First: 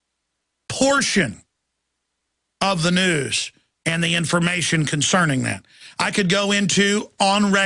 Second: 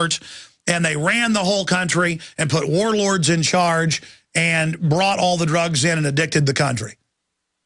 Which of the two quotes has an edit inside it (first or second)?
first